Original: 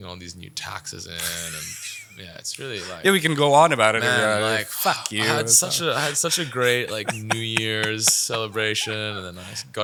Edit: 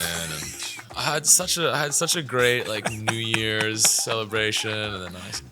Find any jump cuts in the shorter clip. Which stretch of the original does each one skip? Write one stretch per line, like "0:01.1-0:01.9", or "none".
0:02.5-0:05.5